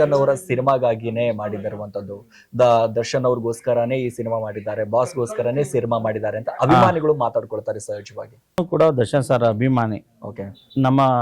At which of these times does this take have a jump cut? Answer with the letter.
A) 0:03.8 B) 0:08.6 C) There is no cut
B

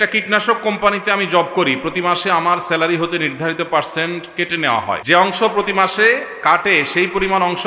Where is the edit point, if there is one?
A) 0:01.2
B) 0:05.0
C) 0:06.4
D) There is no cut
B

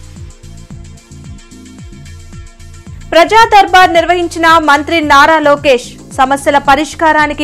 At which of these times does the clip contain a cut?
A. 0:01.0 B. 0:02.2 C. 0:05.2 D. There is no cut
A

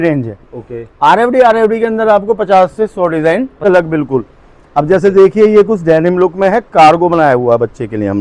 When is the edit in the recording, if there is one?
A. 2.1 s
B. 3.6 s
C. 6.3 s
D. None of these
B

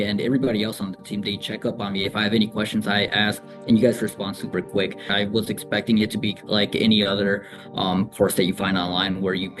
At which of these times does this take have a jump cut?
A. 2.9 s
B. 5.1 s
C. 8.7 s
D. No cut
B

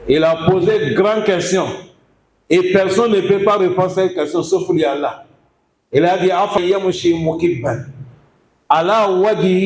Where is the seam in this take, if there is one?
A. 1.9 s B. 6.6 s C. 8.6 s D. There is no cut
B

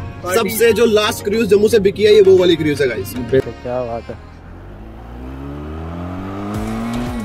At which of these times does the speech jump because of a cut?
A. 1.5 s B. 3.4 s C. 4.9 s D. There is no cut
B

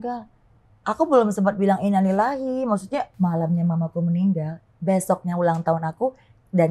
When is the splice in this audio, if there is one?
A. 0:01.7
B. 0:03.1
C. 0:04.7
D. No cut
B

